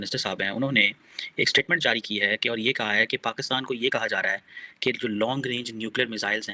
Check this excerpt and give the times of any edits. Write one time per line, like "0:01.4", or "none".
none